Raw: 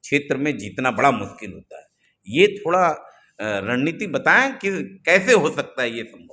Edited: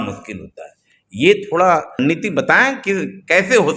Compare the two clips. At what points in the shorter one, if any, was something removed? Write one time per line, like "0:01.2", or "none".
0:01.9